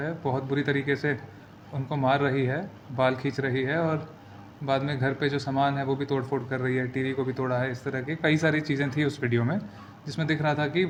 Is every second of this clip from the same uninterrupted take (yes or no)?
yes